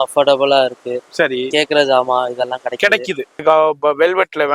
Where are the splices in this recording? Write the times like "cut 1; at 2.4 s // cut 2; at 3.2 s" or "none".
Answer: cut 1; at 3.4 s